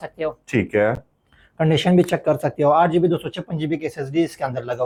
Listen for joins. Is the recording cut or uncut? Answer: uncut